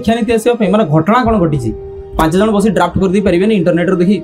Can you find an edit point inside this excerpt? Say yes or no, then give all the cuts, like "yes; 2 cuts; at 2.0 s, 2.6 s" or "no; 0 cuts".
no; 0 cuts